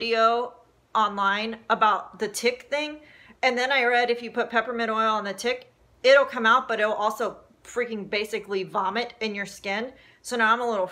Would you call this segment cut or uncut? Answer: uncut